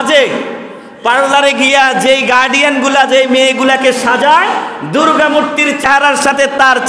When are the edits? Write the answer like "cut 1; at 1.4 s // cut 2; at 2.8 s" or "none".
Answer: cut 1; at 5.8 s